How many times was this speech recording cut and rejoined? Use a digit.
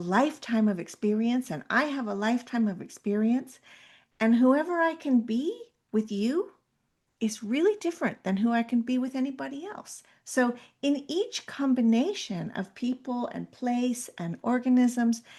0